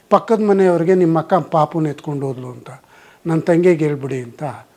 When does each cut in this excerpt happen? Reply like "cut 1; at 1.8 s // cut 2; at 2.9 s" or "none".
none